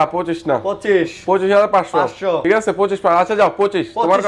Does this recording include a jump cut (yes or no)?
yes